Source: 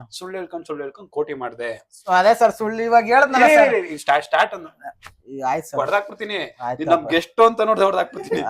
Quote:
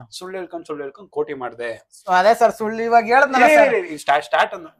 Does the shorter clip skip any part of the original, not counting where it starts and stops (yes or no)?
no